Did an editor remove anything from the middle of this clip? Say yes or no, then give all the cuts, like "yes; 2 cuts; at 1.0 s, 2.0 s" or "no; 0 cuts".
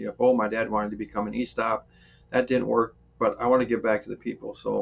no; 0 cuts